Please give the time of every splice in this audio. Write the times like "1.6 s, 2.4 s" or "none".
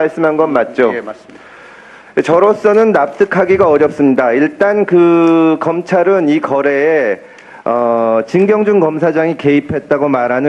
6.5 s